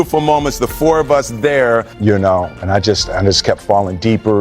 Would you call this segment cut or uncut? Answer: cut